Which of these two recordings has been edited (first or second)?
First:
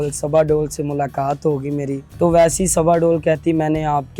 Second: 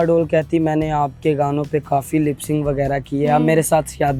first